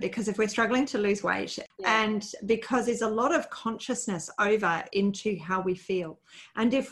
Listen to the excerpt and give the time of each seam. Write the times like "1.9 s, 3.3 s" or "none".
1.6 s